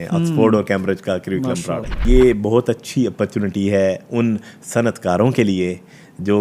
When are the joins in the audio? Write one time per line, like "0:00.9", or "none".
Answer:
0:02.0